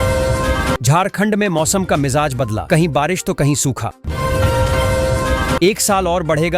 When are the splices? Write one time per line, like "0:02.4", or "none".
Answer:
0:00.8
0:04.0
0:05.6

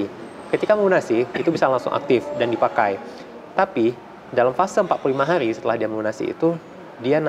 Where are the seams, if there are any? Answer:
none

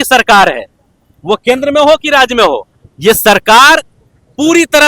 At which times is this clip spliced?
none

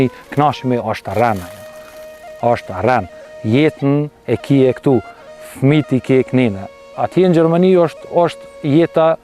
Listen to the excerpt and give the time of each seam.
none

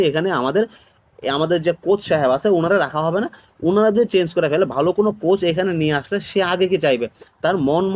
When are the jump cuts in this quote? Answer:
none

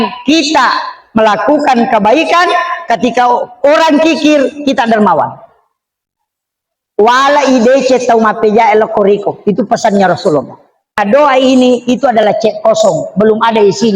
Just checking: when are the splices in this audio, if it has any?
0:11.0

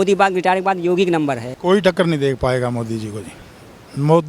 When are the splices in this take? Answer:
0:01.5

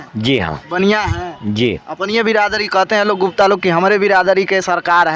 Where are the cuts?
none

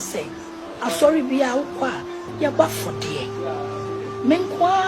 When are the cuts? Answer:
0:02.2

